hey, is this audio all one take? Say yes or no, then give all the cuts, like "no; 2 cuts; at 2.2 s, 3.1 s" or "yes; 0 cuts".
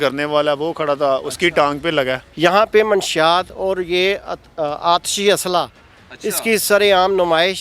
no; 1 cut; at 2.3 s